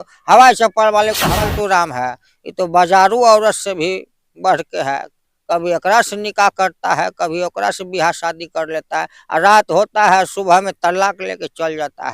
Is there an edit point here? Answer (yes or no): yes